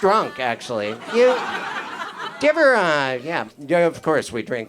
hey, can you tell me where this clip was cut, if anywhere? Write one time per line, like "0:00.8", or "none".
0:03.5